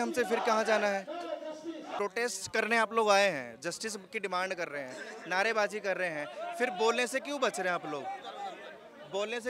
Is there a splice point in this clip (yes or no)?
yes